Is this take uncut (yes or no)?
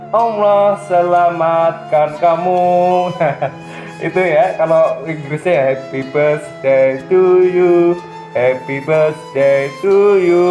yes